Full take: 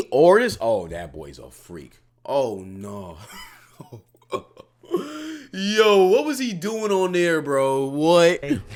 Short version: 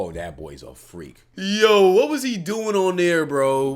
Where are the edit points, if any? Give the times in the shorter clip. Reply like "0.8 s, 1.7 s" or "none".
1.3 s